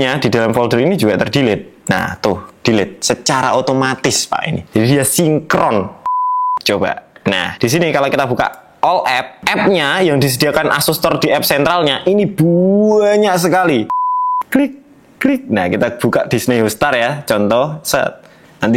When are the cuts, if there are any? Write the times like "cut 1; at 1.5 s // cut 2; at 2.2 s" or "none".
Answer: cut 1; at 6.0 s // cut 2; at 13.9 s